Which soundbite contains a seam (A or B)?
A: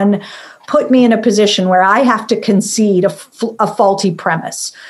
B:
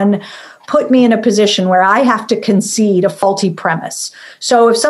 B